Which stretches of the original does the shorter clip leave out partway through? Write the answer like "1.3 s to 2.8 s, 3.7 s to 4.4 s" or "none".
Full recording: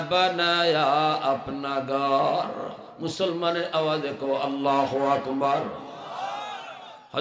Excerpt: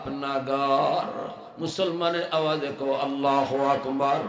none